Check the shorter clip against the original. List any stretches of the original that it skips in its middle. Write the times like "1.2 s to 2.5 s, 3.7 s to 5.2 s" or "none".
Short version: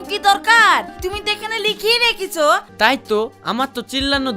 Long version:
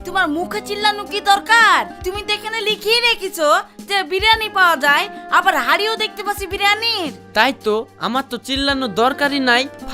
3.7 s to 7.2 s

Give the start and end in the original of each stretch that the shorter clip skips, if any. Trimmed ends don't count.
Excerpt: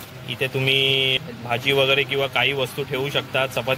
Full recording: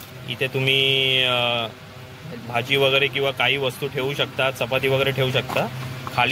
1.2 s to 2.2 s

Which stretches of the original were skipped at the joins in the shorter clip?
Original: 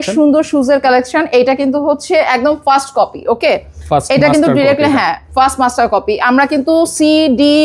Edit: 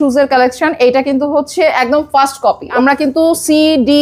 3.3 s to 6.2 s

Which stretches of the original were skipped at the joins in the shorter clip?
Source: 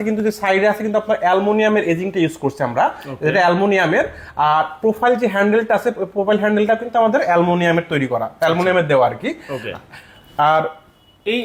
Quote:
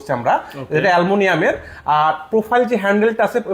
none

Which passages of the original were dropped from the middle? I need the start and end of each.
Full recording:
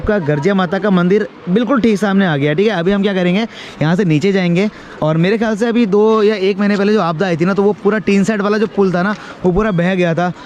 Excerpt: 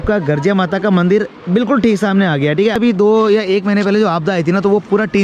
2.8 s to 5.7 s

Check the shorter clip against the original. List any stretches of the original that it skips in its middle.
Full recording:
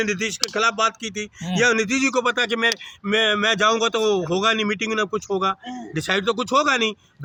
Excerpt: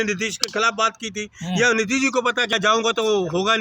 2.5 s to 3.5 s

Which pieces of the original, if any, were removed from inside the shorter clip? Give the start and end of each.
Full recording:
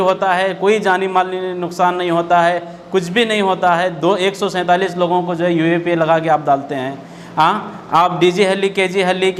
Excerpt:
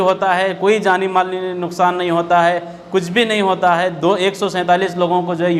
none

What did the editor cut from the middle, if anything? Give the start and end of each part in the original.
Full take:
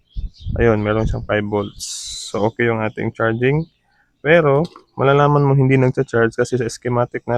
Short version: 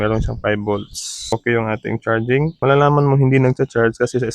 2.2 s to 2.4 s, 3.7 s to 4.9 s

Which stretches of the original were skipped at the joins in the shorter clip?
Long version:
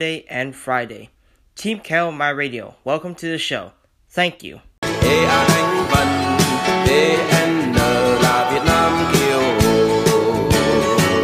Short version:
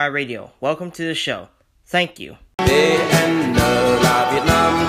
4.8 s to 6.8 s

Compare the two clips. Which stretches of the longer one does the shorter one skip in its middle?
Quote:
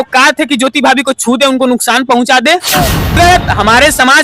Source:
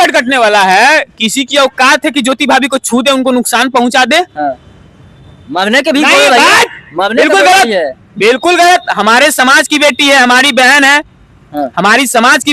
4.8 s to 8.6 s

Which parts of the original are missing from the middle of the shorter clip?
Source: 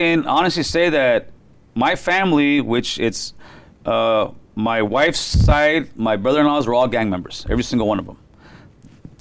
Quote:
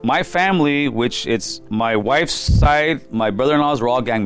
3.3 s to 4.4 s

